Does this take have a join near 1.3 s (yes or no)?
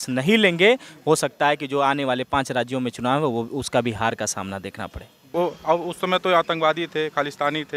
no